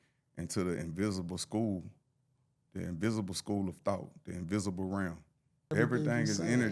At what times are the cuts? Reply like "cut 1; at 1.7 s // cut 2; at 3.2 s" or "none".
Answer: cut 1; at 5.7 s